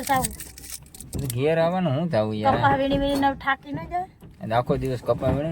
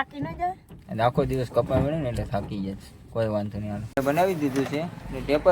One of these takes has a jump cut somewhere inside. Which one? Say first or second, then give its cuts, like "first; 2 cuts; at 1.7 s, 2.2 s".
second; 1 cut; at 4.0 s